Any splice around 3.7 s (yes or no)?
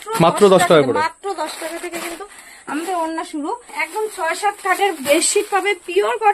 yes